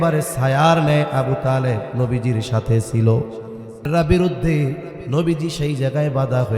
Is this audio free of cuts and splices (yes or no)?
no